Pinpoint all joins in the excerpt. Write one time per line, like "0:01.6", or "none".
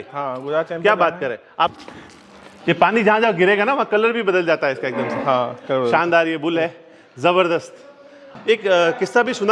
0:01.5
0:08.2